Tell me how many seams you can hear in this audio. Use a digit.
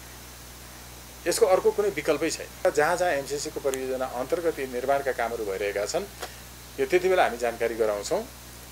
1